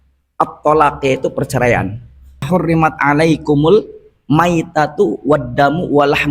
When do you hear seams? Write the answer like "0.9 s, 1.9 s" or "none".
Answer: 2.4 s